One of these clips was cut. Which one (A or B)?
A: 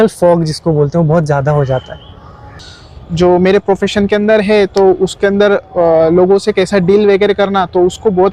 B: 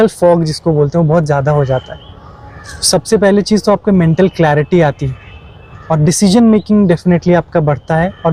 A